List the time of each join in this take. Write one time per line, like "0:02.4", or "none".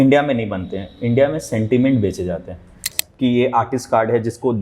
0:02.9